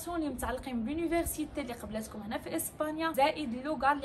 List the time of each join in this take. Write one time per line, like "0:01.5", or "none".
0:03.1